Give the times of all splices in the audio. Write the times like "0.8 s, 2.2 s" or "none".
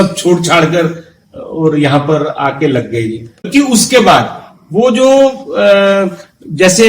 3.5 s